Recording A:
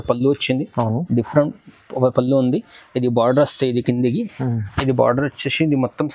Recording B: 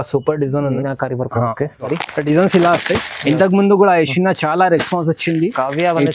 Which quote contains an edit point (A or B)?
B